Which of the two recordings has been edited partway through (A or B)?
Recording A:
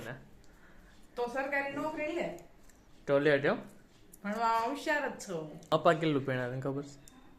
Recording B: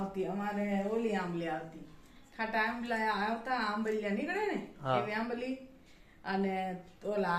A